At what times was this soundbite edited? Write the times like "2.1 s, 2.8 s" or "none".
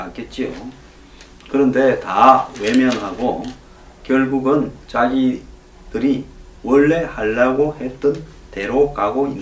none